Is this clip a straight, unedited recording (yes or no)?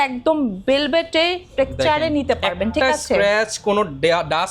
yes